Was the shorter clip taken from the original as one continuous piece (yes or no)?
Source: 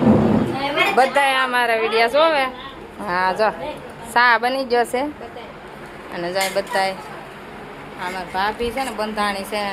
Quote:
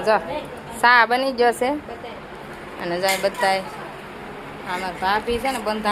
yes